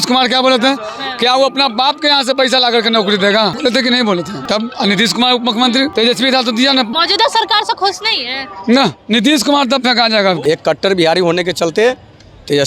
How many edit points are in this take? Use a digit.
5